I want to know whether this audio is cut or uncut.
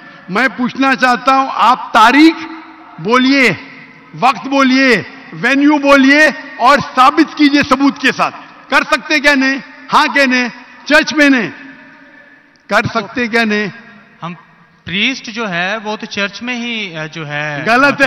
uncut